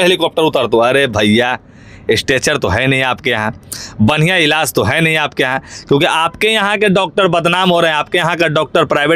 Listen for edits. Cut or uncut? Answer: uncut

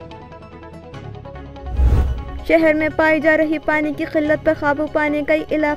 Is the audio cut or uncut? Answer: cut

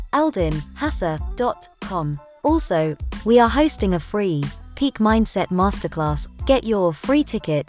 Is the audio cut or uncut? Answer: cut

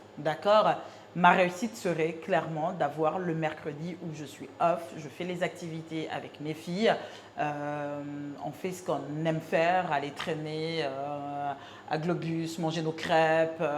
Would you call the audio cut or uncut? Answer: uncut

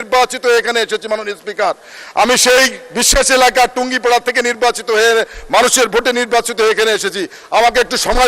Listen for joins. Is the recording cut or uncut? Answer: uncut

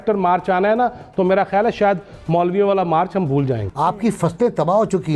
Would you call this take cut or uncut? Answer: cut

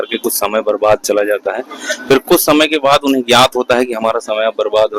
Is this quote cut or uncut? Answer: uncut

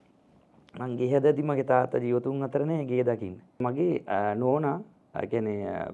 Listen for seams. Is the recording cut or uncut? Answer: cut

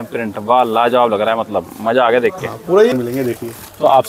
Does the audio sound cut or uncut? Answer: cut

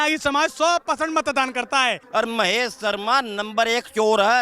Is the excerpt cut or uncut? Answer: cut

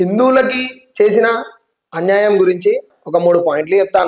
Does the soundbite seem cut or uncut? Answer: cut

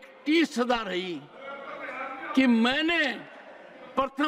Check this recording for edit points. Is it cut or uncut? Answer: uncut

